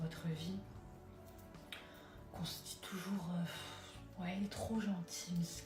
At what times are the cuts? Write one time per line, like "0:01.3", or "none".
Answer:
none